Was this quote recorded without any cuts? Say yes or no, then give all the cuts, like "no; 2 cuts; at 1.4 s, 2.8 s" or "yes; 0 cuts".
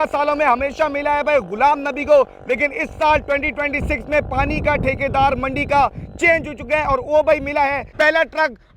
no; 1 cut; at 7.8 s